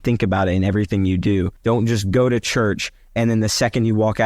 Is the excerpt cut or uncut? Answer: cut